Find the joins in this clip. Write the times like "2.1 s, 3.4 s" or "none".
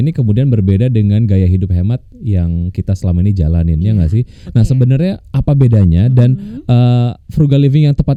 none

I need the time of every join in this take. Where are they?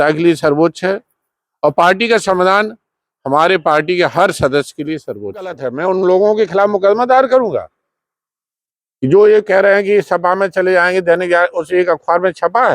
5.7 s

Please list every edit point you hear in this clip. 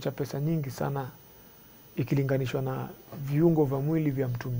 none

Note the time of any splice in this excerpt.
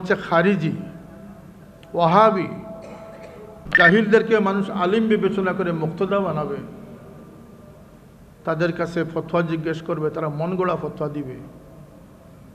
3.7 s

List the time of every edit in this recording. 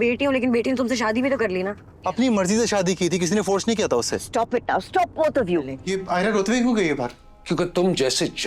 5.8 s

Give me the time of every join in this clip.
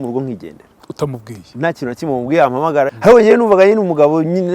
2.9 s

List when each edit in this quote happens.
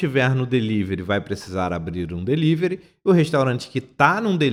none

